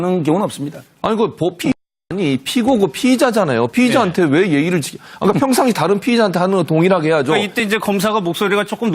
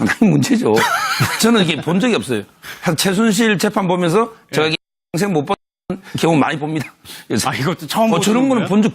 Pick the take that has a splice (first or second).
first